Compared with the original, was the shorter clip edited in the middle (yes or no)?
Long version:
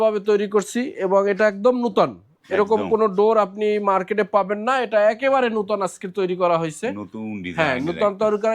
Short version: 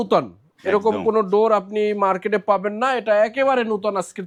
no